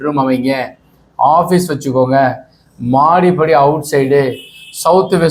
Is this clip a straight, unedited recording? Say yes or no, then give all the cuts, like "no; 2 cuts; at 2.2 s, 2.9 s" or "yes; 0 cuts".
yes; 0 cuts